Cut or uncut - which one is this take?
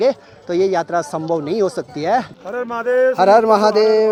uncut